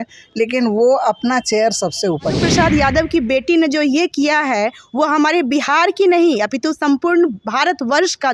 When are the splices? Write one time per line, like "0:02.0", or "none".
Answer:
0:02.4